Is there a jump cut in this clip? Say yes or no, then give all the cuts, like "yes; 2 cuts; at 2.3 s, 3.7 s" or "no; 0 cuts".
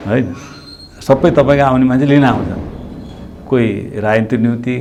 no; 0 cuts